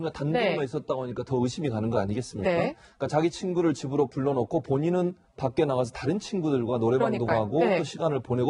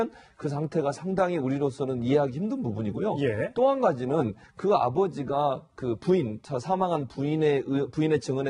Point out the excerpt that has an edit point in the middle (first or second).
second